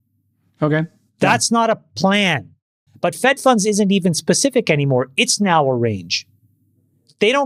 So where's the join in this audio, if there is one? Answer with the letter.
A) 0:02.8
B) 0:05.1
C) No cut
A